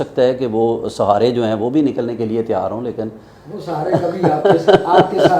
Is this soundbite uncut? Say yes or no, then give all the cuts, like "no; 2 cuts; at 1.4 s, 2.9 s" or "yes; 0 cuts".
yes; 0 cuts